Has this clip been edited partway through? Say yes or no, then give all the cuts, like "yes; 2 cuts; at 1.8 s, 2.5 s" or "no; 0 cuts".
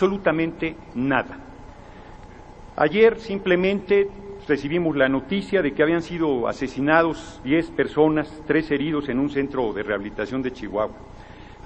yes; 1 cut; at 9.7 s